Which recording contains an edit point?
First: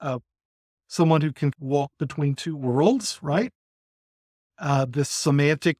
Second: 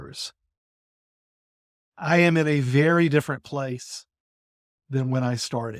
first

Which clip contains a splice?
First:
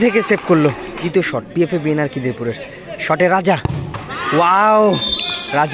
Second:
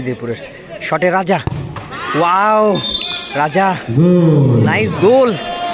first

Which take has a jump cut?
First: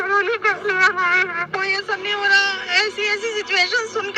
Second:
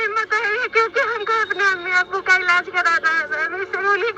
first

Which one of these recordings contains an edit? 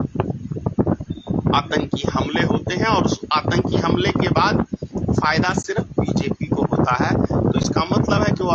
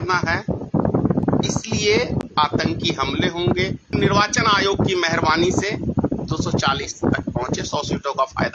second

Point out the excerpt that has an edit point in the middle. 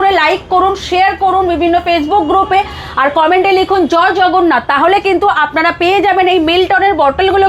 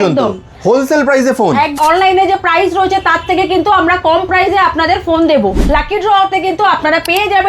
second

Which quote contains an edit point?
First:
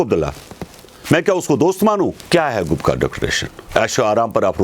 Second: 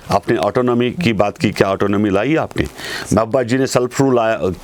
first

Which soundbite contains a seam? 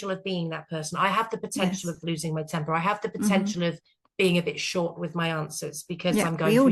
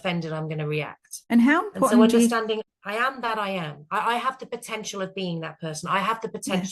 second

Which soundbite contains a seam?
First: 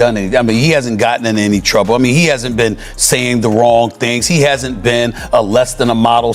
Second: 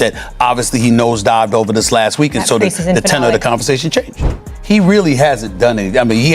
second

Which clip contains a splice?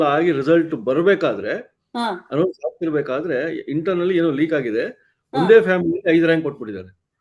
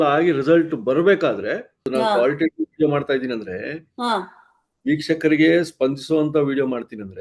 second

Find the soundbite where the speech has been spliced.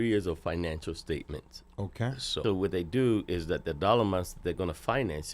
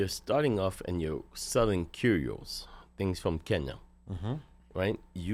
first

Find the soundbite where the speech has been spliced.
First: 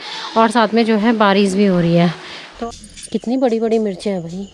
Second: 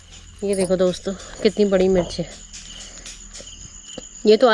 first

